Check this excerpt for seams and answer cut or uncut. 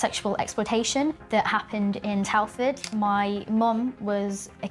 cut